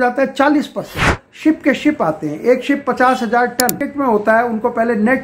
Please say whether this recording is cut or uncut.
cut